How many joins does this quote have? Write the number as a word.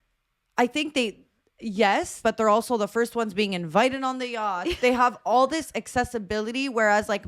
one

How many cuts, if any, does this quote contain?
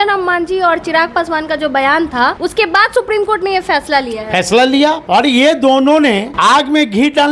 three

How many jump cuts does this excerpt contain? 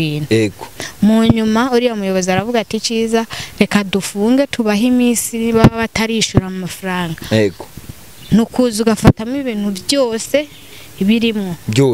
zero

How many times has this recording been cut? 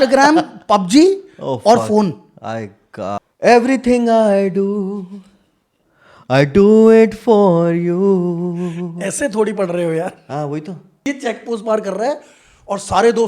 two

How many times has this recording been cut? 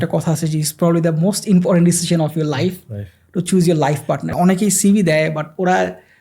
one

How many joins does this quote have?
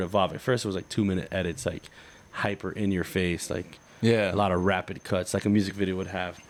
zero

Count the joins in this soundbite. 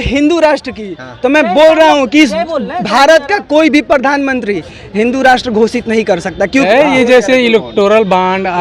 one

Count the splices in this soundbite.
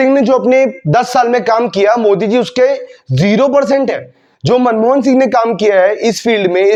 zero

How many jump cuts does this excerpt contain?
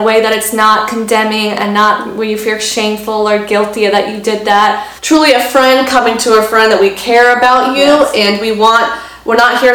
one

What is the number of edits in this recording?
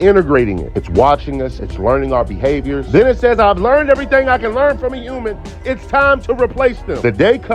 one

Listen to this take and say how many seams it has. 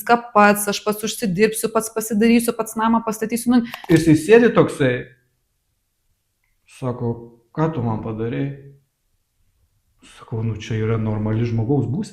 one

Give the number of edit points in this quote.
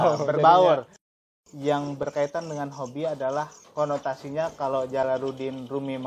one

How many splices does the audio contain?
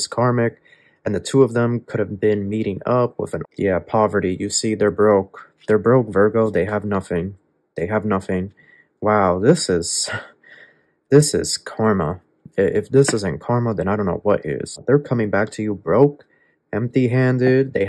two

